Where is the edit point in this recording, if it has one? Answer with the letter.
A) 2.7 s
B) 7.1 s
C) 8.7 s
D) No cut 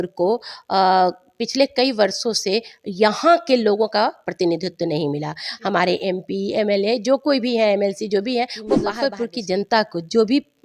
C